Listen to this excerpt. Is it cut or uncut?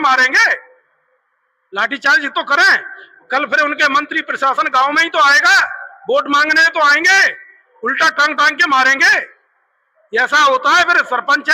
uncut